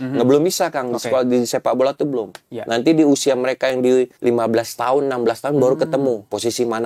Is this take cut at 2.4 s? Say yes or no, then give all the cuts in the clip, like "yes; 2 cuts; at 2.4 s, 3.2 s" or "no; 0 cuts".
no; 1 cut; at 4.1 s